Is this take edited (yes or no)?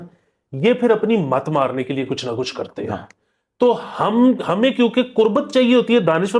no